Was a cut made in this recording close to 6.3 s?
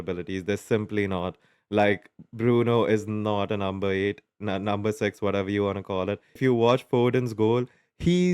yes; 1 cut; at 6.3 s

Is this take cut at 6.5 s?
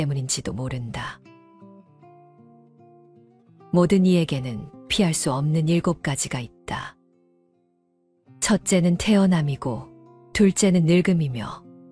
no; 2 cuts; at 1.2 s, 3.7 s

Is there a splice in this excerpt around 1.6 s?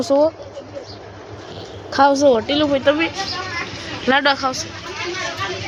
no; 0 cuts

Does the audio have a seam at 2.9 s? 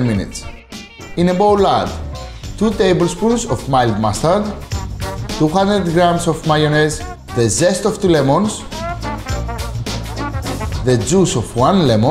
no; 1 cut; at 1.3 s

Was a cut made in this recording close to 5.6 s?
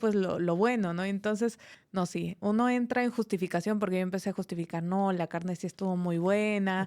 no; 1 cut; at 1.7 s

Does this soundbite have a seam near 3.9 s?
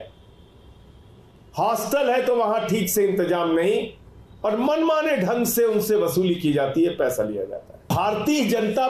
no; 1 cut; at 7.9 s

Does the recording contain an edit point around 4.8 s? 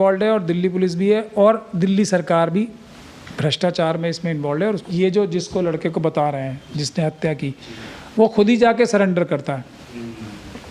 yes; 1 cut; at 4.8 s

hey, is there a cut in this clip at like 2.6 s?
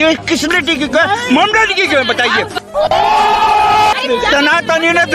yes; 2 cuts; at 2.6 s, 3.9 s

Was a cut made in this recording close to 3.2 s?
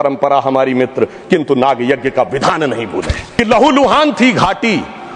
yes; 1 cut; at 3.2 s

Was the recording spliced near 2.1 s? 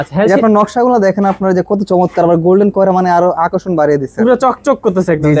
no; 0 cuts

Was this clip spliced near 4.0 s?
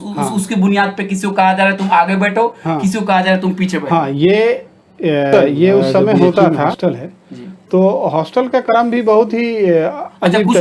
no; 1 cut; at 6.8 s

